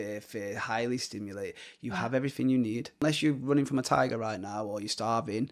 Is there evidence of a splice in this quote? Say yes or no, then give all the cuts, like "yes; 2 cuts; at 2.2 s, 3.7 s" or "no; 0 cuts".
yes; 1 cut; at 3.0 s